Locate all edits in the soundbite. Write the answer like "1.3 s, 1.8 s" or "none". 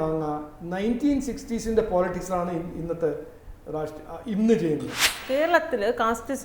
5.2 s